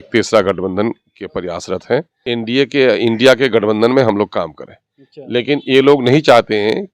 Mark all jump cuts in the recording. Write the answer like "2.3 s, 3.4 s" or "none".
2.1 s